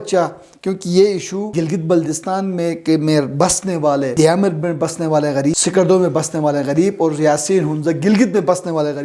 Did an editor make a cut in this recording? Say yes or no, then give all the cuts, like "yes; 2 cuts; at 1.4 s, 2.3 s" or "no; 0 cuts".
yes; 3 cuts; at 1.5 s, 4.1 s, 5.6 s